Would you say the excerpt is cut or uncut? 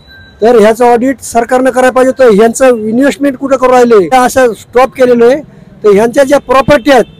cut